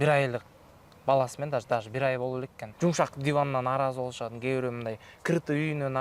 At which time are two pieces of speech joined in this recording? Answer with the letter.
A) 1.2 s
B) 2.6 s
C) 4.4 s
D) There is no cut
B